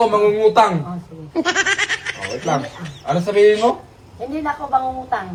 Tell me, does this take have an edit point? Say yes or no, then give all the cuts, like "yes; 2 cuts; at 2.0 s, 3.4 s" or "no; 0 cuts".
no; 0 cuts